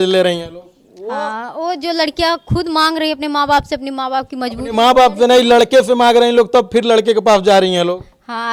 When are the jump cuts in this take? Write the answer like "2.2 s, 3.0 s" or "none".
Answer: none